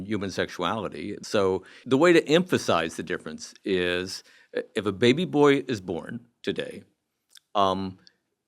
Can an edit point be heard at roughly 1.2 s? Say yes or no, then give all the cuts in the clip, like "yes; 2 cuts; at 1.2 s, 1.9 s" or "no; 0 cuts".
yes; 1 cut; at 1.2 s